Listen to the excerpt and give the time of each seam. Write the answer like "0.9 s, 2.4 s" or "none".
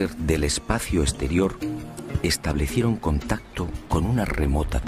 2.0 s